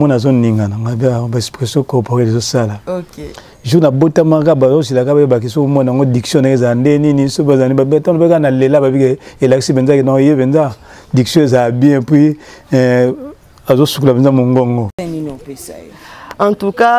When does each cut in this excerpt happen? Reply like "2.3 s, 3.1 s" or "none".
14.9 s